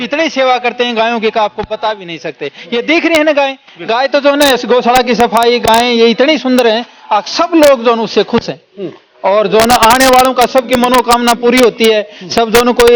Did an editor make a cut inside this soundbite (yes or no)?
no